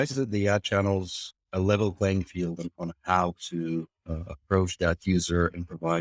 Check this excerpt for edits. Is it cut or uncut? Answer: uncut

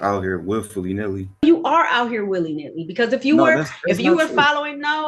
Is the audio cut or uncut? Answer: cut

